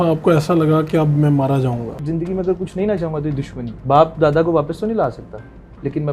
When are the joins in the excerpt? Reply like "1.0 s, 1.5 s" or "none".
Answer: 2.0 s, 3.6 s

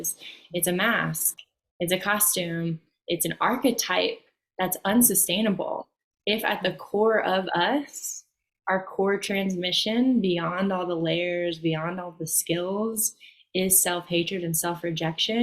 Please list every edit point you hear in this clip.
none

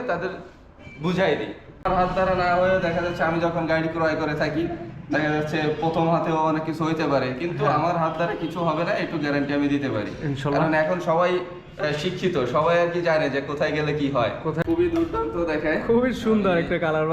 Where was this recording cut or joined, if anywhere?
1.9 s, 14.6 s

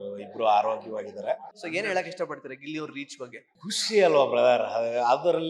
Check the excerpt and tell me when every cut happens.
1.5 s, 3.5 s

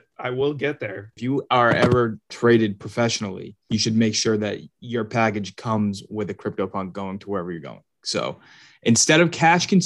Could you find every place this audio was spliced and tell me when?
1.2 s

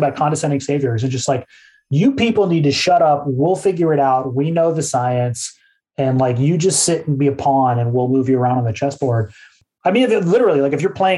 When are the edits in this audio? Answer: 9.6 s

